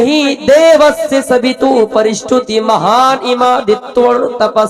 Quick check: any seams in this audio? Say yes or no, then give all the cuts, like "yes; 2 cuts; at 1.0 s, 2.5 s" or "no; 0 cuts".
no; 0 cuts